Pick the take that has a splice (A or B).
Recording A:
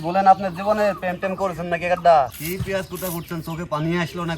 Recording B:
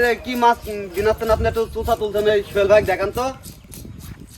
A